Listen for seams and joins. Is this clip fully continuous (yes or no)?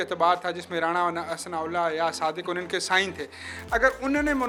yes